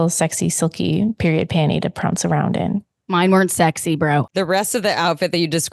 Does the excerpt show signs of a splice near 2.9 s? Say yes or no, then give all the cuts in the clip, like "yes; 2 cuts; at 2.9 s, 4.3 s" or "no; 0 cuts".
no; 1 cut; at 4.3 s